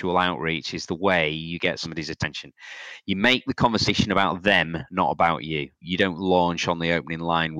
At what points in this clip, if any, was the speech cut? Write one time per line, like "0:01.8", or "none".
0:05.8